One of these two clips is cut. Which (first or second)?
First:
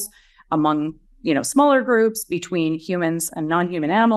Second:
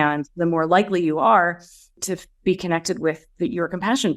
second